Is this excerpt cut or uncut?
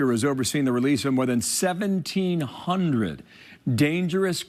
uncut